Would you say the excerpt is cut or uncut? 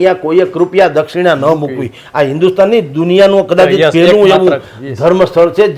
uncut